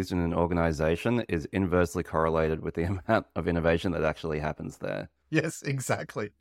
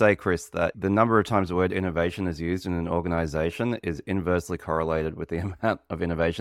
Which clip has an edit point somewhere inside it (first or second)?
first